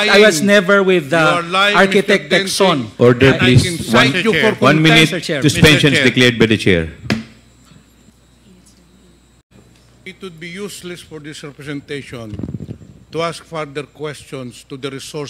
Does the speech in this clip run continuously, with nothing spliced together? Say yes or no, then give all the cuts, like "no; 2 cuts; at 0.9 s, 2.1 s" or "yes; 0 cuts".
no; 1 cut; at 9.6 s